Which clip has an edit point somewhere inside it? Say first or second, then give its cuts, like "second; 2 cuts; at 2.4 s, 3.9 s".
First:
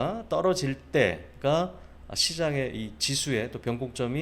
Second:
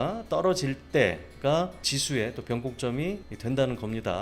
second; 2 cuts; at 1.9 s, 3.3 s